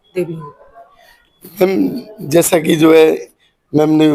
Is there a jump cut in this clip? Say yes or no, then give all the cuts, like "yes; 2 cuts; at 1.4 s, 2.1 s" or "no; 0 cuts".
no; 0 cuts